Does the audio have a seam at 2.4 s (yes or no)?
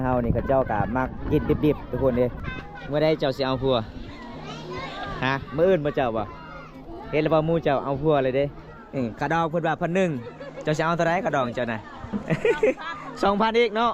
yes